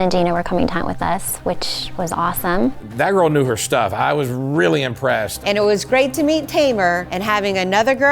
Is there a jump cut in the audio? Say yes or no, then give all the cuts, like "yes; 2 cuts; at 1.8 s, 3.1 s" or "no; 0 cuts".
yes; 3 cuts; at 2.8 s, 5.3 s, 7.1 s